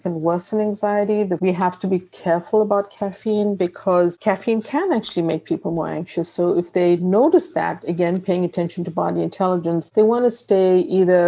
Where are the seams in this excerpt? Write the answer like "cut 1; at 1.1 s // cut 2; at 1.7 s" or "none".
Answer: cut 1; at 1.4 s